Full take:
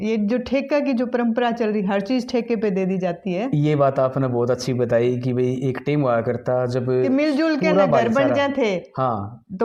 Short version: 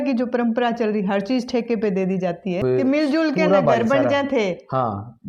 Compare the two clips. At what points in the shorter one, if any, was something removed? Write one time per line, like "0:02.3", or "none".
0:02.6